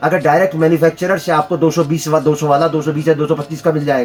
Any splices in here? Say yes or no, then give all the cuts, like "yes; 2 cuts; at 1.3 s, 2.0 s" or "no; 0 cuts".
no; 0 cuts